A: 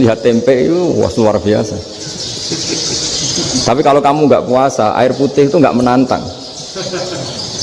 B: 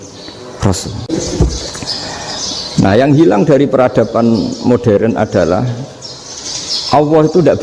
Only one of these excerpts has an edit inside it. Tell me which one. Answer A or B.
B